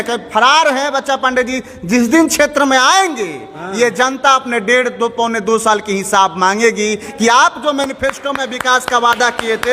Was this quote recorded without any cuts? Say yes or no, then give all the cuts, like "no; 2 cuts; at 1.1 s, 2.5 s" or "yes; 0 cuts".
yes; 0 cuts